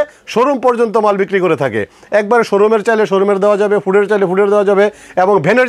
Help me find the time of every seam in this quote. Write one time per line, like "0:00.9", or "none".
none